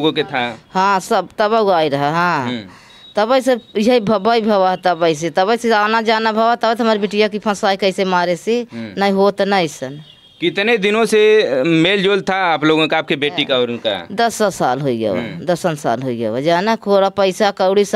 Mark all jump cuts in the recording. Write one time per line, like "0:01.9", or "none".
none